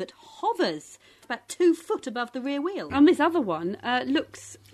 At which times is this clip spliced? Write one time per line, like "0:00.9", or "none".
0:01.3
0:02.8